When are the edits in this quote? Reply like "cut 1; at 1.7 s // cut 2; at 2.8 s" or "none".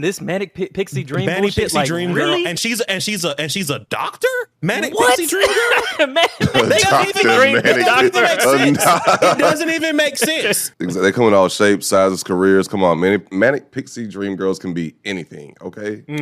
none